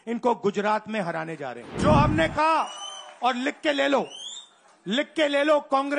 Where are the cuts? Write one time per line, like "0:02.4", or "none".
0:01.7